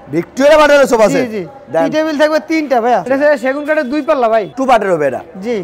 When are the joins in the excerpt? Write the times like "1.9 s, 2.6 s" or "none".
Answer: 3.0 s

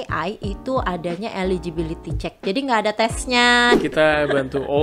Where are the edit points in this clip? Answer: 3.8 s

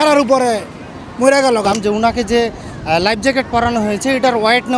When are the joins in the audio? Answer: 1.7 s

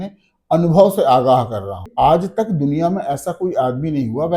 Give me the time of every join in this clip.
1.9 s

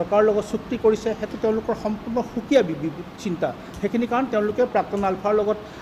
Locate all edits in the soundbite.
none

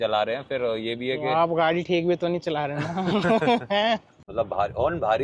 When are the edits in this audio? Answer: 4.2 s

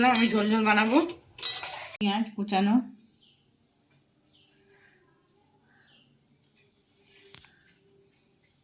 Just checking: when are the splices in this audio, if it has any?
2.0 s

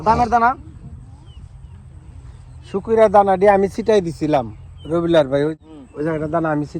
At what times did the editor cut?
5.5 s

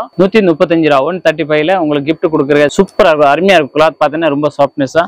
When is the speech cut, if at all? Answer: 2.7 s

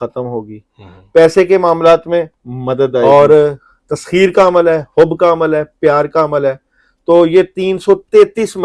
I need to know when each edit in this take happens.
3.0 s

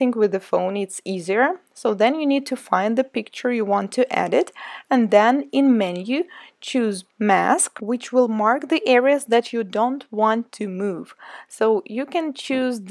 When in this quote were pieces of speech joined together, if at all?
9.5 s

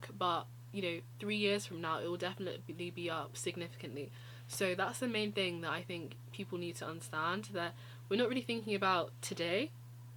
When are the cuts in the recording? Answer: none

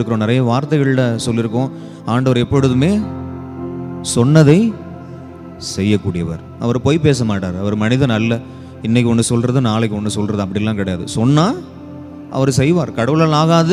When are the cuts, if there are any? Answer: none

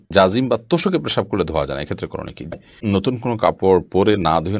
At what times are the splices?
2.6 s

